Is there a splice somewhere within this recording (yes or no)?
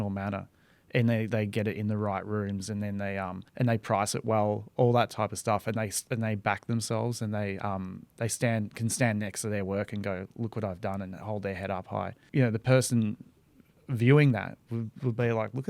yes